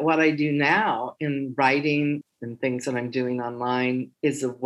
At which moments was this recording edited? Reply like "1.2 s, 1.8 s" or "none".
2.2 s